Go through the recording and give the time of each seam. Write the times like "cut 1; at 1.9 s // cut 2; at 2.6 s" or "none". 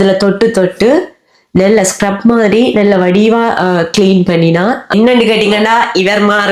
cut 1; at 4.9 s